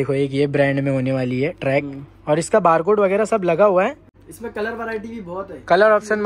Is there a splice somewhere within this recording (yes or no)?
yes